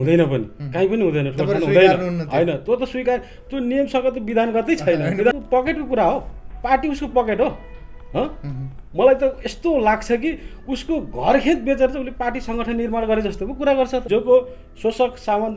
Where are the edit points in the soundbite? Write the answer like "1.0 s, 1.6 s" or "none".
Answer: 5.3 s, 14.1 s